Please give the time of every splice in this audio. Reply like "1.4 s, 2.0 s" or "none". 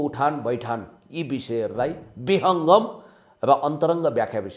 none